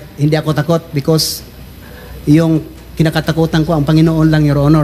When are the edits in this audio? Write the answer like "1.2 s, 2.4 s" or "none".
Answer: none